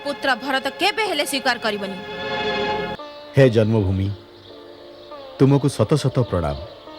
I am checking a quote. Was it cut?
yes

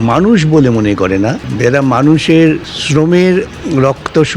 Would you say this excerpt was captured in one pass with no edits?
no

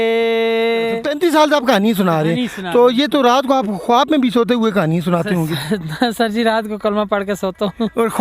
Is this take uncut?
no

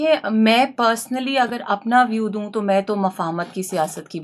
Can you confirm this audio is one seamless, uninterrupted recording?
yes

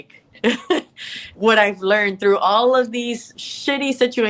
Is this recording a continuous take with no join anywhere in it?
no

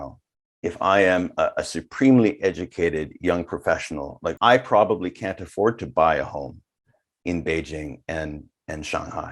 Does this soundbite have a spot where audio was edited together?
yes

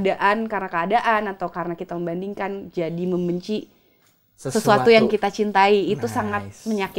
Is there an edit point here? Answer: no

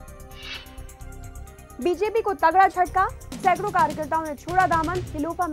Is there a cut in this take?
yes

